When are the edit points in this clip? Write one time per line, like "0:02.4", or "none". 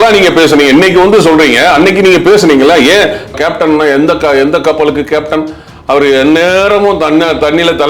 0:03.3